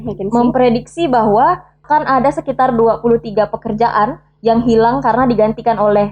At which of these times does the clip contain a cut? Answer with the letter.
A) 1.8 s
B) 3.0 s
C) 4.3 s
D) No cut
A